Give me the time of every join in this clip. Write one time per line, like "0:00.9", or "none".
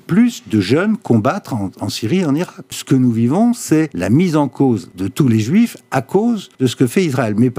0:02.7
0:04.0
0:05.0
0:06.5